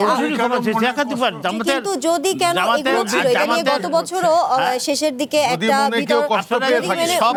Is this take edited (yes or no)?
no